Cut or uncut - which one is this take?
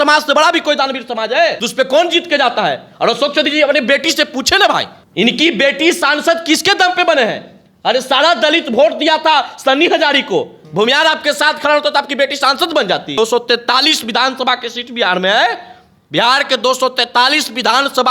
cut